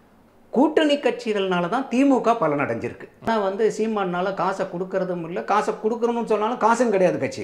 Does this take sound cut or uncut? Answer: cut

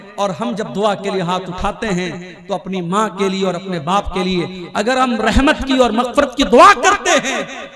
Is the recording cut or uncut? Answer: uncut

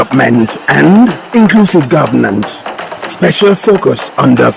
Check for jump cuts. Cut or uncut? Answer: cut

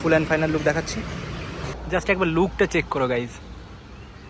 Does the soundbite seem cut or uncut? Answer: cut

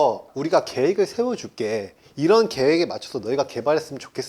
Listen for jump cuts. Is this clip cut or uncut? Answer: uncut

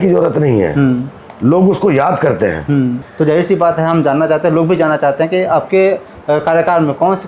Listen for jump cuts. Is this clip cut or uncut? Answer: cut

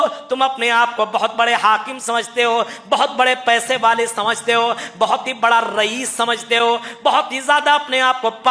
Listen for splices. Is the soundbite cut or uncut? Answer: uncut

